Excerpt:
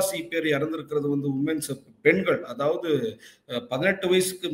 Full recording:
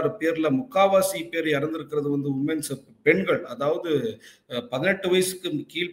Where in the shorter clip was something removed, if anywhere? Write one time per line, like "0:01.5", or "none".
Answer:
none